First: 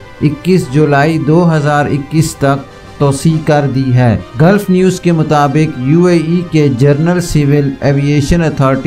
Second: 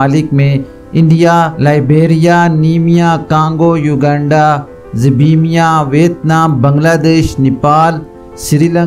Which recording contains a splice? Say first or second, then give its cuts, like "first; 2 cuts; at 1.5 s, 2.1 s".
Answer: first; 1 cut; at 4.3 s